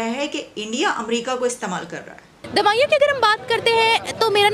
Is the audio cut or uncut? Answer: cut